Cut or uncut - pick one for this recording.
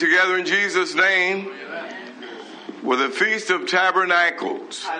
uncut